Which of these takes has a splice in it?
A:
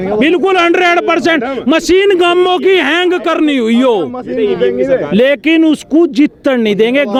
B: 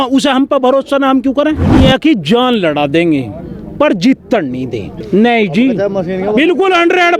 B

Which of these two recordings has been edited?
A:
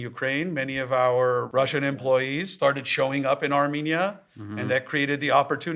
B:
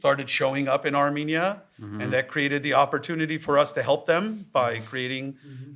A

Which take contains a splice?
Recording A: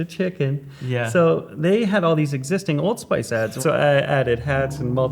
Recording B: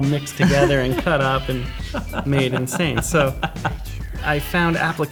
A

